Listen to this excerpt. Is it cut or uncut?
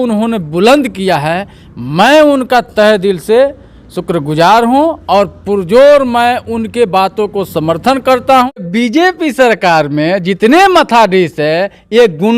cut